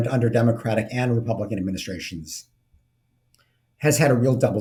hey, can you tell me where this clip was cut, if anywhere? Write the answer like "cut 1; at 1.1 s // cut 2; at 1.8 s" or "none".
none